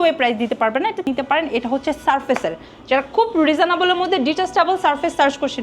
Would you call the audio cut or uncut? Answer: cut